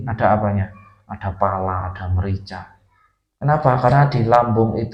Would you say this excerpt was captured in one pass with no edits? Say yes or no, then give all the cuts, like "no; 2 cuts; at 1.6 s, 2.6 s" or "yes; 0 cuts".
yes; 0 cuts